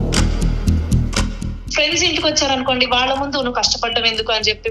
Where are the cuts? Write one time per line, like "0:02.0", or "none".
0:01.6